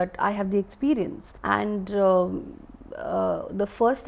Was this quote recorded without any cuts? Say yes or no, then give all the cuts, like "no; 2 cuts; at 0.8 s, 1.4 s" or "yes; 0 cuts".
yes; 0 cuts